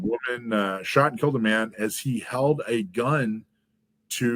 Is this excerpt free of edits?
yes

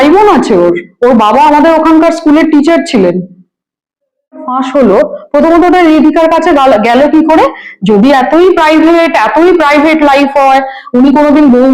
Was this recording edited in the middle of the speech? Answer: yes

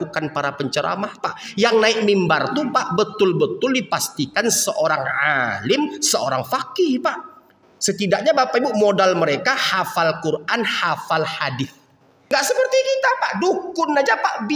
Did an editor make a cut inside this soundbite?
yes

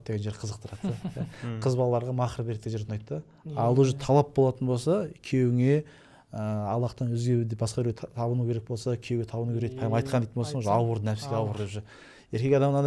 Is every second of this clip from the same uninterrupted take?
yes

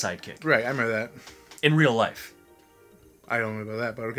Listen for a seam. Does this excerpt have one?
no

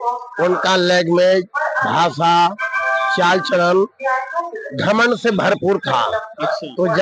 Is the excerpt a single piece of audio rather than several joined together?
yes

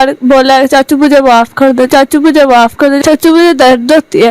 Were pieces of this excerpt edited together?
yes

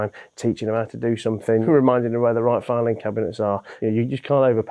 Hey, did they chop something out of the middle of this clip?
yes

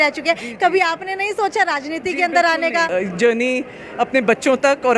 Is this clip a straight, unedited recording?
no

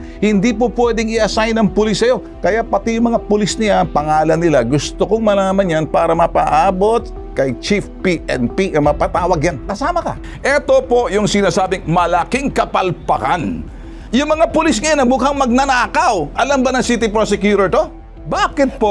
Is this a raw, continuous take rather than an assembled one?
no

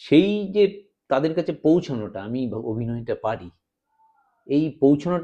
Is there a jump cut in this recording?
no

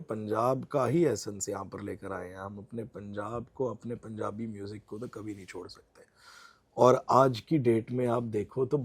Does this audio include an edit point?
no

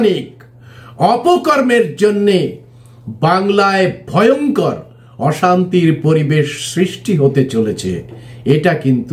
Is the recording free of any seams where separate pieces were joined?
yes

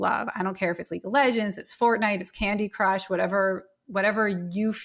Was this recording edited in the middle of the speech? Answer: no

